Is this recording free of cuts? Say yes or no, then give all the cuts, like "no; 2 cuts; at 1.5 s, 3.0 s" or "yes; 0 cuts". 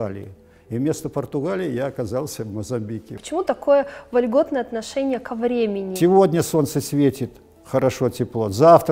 no; 2 cuts; at 3.2 s, 5.9 s